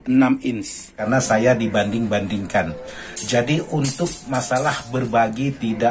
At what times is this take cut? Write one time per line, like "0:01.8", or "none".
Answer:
0:01.0